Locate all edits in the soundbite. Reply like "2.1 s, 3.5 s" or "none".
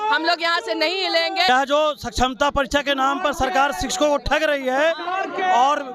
1.5 s